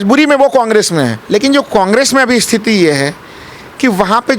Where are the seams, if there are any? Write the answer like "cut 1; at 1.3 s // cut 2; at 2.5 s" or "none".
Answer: cut 1; at 1.2 s